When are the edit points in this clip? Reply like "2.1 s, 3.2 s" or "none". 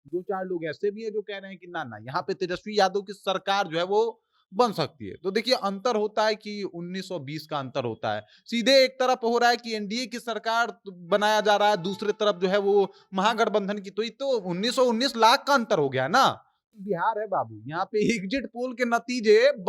16.6 s